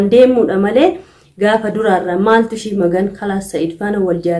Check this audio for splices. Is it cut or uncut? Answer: uncut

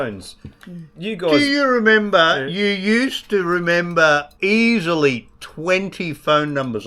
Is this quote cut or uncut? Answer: cut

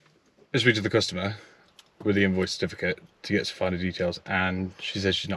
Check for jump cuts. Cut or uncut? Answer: uncut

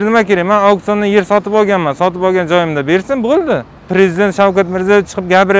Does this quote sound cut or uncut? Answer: cut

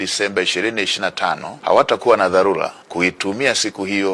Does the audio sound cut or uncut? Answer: cut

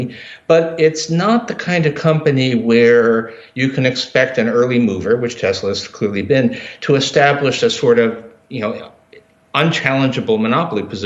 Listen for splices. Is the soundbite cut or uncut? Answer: uncut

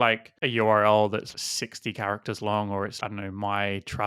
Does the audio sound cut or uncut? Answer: cut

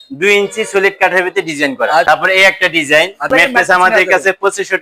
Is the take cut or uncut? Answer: cut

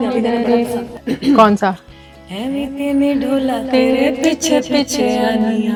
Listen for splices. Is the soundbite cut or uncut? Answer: uncut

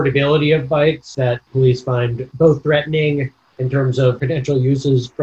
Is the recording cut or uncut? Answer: cut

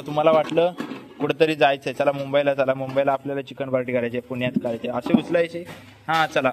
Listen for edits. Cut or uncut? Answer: uncut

